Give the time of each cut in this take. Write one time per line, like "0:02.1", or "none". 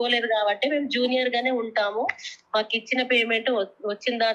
none